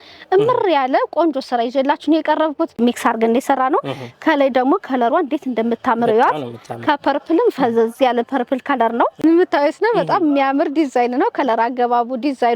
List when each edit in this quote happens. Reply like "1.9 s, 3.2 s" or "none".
2.8 s, 9.1 s